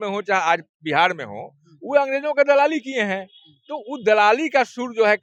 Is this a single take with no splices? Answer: yes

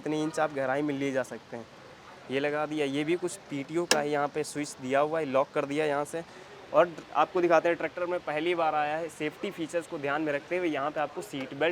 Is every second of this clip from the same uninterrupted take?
yes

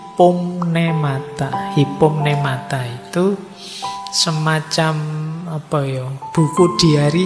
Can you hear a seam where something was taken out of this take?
no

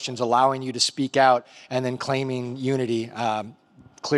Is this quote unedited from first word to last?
yes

